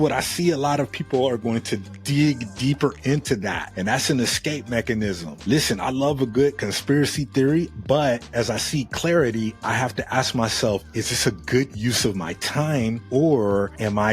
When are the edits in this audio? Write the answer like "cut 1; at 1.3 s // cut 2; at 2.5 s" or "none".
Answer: cut 1; at 8.3 s // cut 2; at 13.0 s